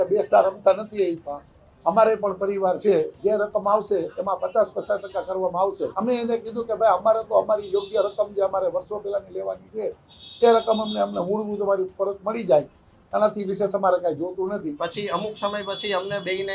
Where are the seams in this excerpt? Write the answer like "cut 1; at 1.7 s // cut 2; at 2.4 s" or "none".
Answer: cut 1; at 6.0 s // cut 2; at 14.8 s

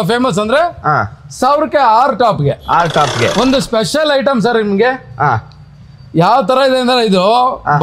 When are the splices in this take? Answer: cut 1; at 3.3 s

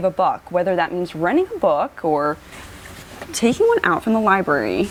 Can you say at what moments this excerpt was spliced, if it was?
none

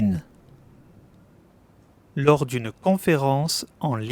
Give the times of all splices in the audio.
cut 1; at 2.1 s

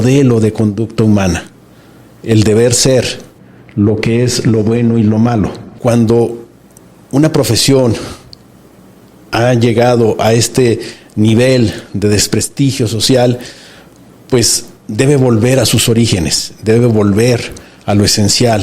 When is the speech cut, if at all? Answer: cut 1; at 5.6 s

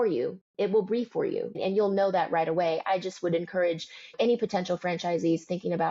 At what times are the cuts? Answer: cut 1; at 1.5 s // cut 2; at 4.1 s

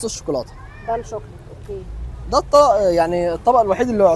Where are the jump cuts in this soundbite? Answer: none

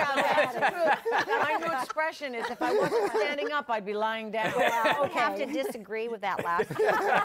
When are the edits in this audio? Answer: cut 1; at 1.4 s // cut 2; at 5.0 s

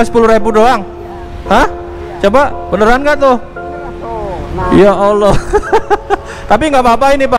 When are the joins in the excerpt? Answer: none

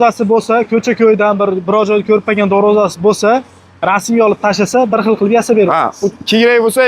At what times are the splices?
none

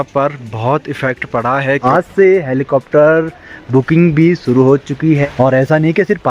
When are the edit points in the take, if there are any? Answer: cut 1; at 1.8 s // cut 2; at 5.2 s

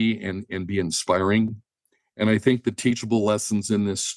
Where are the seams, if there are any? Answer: none

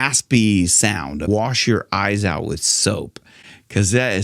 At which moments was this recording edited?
cut 1; at 1.2 s

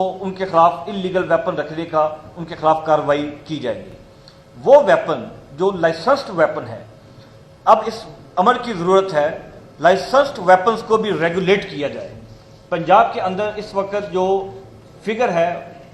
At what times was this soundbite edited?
none

